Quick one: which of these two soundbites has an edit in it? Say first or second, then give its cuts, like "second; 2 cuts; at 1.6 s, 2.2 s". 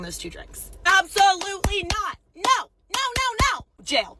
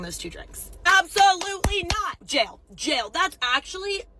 second; 1 cut; at 2.2 s